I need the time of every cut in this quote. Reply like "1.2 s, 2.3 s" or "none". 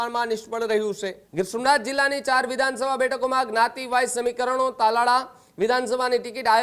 1.2 s